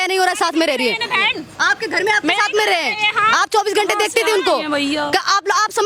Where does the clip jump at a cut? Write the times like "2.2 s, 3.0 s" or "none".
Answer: none